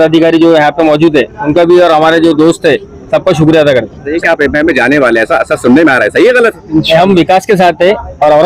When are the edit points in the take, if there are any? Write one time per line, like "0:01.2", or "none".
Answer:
0:04.1